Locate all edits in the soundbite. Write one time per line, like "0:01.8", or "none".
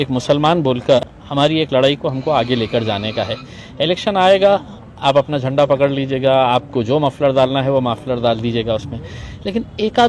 0:01.2